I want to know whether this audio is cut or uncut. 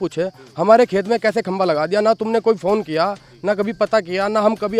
uncut